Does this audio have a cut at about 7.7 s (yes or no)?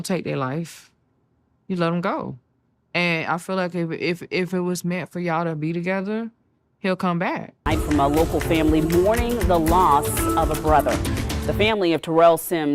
yes